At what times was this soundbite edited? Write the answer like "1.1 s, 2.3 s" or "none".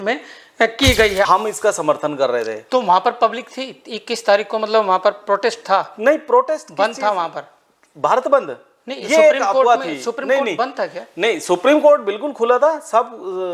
1.3 s